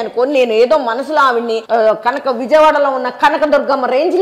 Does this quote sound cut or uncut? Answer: cut